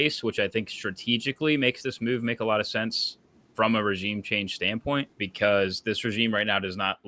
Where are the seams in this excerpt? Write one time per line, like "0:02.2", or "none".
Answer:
0:05.2